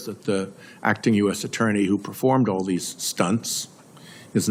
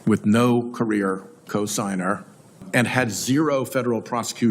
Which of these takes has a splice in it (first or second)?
second